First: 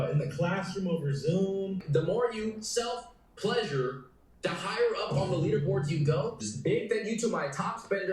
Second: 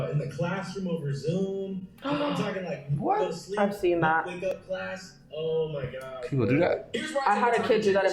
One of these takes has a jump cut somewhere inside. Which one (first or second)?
first